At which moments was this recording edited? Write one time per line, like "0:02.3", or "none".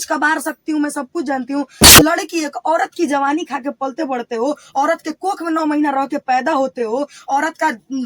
0:02.0